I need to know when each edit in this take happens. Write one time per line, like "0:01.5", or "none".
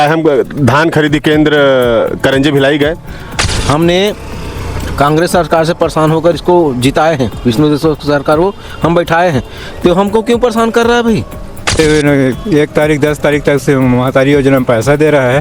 0:03.5
0:11.7